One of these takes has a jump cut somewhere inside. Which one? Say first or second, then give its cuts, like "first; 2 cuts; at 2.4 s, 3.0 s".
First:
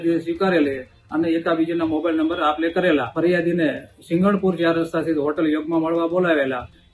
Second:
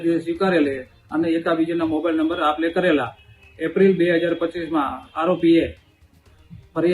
first; 1 cut; at 3.1 s